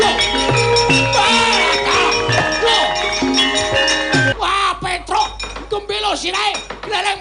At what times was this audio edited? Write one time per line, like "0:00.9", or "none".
0:04.3